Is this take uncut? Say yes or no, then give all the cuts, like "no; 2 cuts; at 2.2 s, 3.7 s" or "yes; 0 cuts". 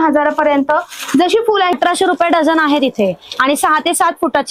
no; 1 cut; at 1.7 s